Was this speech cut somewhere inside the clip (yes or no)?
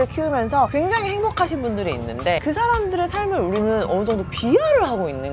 no